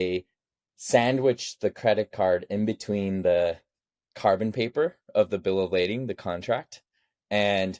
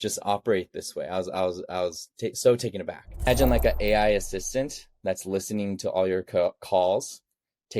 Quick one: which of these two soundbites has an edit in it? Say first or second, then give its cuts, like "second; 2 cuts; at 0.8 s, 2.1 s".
second; 1 cut; at 3.3 s